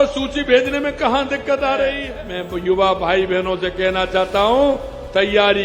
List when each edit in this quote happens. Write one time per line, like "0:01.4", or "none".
0:02.1